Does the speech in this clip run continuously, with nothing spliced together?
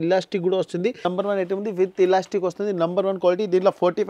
no; 1 cut; at 1.0 s

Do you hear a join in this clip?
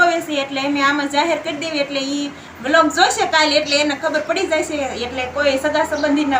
no; 0 cuts

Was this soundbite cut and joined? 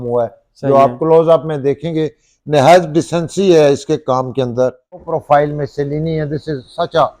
yes; 1 cut; at 5.1 s

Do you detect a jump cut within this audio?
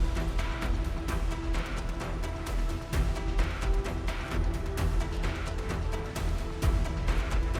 no; 0 cuts

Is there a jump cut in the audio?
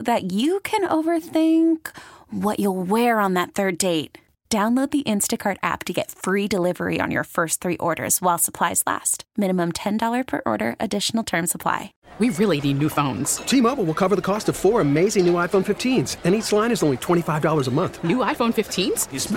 yes; 1 cut; at 12.0 s

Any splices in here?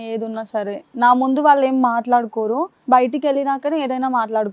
no; 0 cuts

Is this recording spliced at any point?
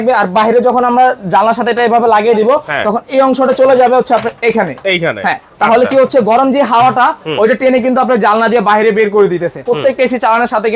yes; 1 cut; at 9.6 s

